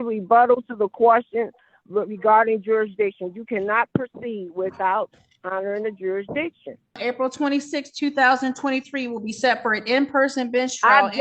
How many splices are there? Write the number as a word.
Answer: one